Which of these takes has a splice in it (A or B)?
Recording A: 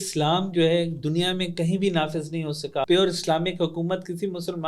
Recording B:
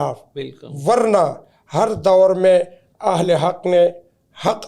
A